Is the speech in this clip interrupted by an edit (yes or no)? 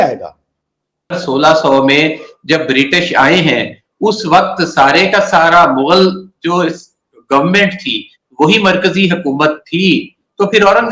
yes